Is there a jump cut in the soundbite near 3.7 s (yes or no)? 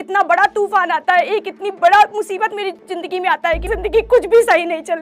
yes